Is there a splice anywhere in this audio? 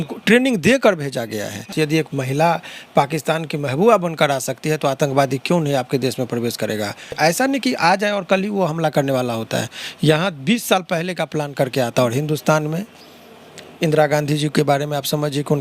yes; 2 cuts; at 1.7 s, 7.1 s

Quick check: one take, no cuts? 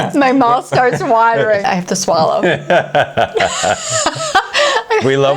no; 1 cut; at 1.6 s

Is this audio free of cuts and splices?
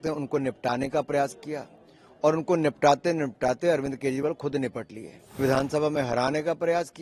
no; 1 cut; at 5.4 s

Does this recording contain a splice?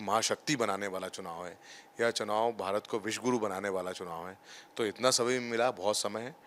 no; 0 cuts

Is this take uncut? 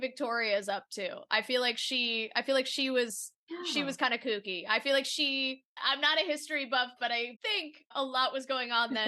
no; 2 cuts; at 5.8 s, 7.3 s

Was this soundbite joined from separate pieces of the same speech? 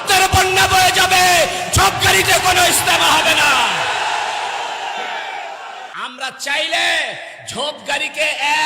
yes; 1 cut; at 5.9 s

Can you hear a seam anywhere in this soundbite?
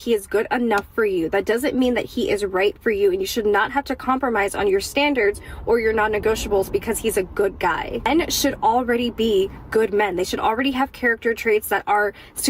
yes; 4 cuts; at 1.5 s, 3.3 s, 5.5 s, 9.0 s

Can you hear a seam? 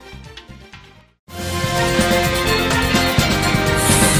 no; 0 cuts

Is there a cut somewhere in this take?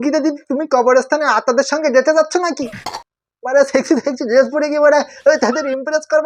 no; 0 cuts

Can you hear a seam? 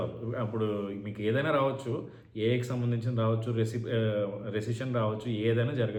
no; 0 cuts

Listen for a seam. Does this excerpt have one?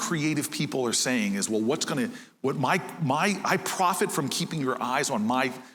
no; 0 cuts

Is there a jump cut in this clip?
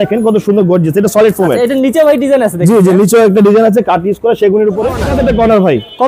yes; 1 cut; at 5.0 s

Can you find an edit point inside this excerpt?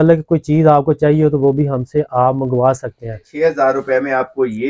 yes; 1 cut; at 3.2 s

